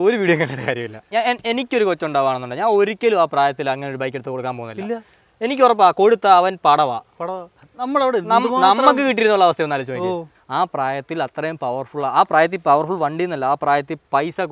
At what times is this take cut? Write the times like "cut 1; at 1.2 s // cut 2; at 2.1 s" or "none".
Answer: cut 1; at 1.0 s // cut 2; at 10.3 s